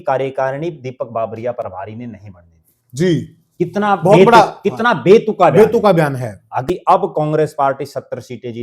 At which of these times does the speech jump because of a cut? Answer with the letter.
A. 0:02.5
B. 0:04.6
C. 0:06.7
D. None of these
C